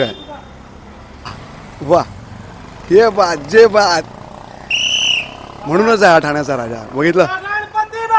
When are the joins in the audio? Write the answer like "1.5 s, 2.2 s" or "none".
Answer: 1.5 s